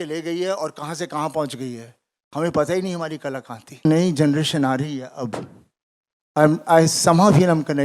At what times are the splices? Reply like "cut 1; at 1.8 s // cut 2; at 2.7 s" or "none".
cut 1; at 3.9 s